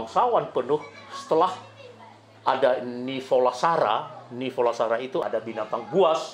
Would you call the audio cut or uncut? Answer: cut